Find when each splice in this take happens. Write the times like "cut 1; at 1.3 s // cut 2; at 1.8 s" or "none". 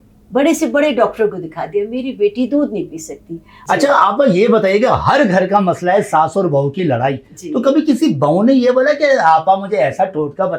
cut 1; at 3.6 s